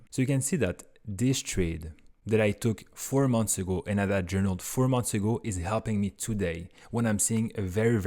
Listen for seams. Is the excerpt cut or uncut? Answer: uncut